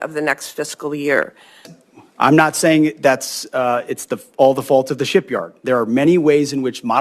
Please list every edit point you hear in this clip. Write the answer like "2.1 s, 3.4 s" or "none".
1.7 s